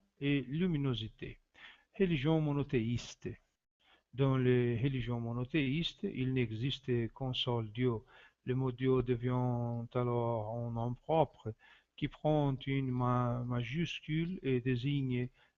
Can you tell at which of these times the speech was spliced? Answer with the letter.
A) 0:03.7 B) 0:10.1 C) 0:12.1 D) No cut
D